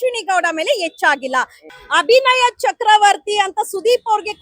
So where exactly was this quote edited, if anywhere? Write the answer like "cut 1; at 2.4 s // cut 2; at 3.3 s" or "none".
cut 1; at 1.7 s